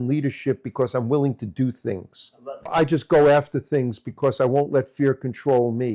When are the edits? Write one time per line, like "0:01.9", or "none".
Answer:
0:02.7